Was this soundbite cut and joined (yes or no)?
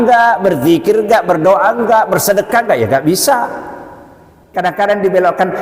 yes